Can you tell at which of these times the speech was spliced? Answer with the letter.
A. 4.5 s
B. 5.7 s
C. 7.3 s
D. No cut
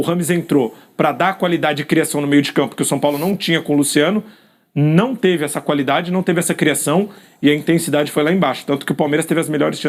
D